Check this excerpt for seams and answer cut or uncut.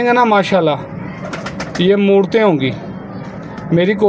uncut